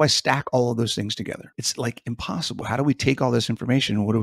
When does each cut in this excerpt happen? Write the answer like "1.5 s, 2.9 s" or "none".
1.3 s, 2.6 s